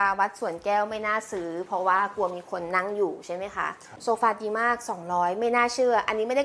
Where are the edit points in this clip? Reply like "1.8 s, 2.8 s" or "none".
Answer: 3.9 s

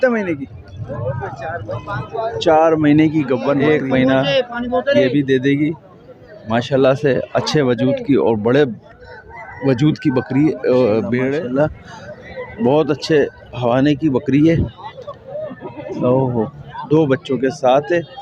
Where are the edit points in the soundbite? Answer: 3.6 s, 11.4 s

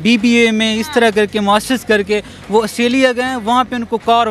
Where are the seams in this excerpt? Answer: none

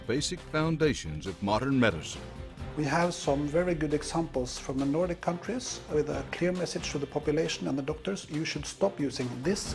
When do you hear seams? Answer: 5.4 s

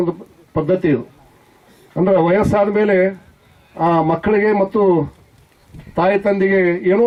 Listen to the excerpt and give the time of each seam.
none

